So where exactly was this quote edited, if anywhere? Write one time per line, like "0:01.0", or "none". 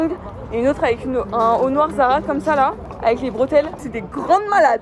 0:02.9
0:03.8